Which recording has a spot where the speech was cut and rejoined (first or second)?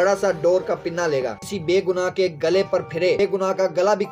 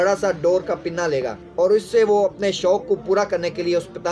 first